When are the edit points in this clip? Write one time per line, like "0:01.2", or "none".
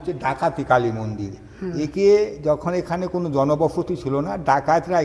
none